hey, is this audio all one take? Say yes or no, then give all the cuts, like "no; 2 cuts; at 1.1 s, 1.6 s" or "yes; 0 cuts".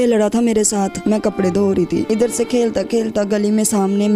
no; 2 cuts; at 1.0 s, 2.1 s